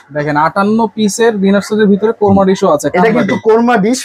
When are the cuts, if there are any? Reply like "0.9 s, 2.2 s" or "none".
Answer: none